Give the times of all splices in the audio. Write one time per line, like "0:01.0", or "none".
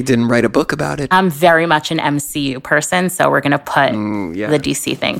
0:01.0

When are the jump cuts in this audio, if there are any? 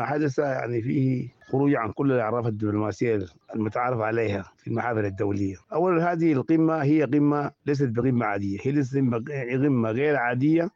none

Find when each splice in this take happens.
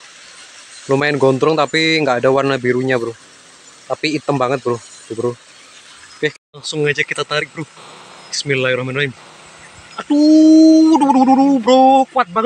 0:06.4

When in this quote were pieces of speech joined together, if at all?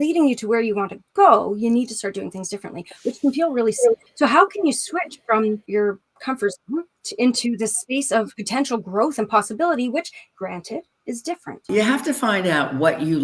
0:04.1
0:05.6
0:07.0
0:08.4
0:10.2
0:11.6

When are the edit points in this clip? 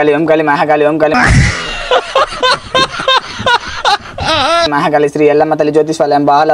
none

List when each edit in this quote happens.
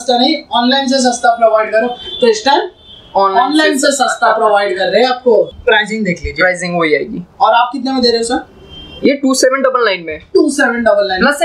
0:05.5

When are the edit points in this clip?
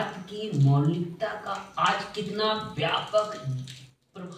none

